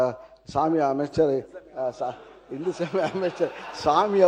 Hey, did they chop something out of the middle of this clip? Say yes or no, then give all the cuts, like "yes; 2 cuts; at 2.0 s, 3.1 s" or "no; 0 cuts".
no; 0 cuts